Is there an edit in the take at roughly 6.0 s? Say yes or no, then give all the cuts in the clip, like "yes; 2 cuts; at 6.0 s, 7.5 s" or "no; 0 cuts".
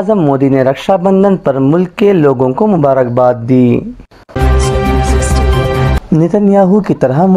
yes; 2 cuts; at 4.3 s, 6.0 s